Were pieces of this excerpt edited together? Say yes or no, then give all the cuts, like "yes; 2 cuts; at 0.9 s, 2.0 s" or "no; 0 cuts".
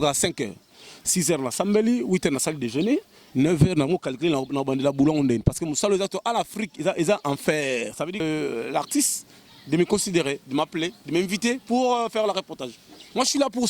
yes; 1 cut; at 8.2 s